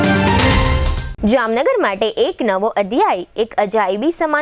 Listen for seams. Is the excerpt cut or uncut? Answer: cut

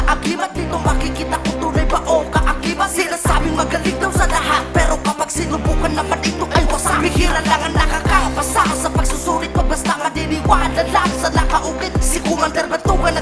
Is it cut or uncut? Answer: uncut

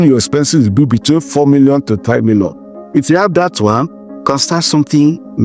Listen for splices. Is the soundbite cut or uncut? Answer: uncut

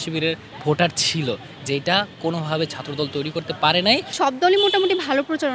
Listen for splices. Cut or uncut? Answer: cut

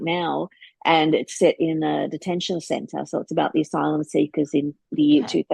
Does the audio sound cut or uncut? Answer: uncut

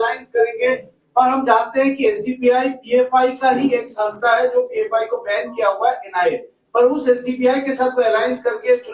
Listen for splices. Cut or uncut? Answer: cut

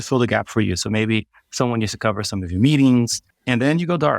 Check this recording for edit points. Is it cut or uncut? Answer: cut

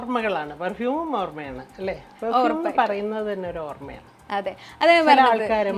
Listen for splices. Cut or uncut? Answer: uncut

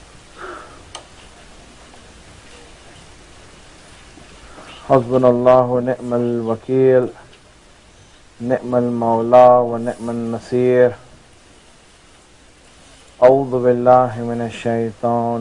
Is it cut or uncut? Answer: uncut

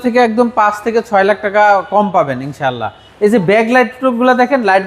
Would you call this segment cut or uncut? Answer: cut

